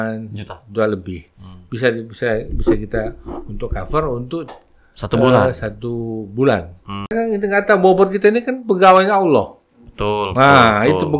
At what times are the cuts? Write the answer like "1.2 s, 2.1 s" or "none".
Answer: 7.1 s